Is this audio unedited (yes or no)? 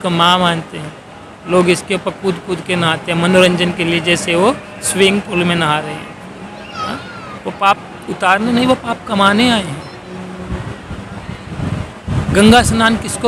yes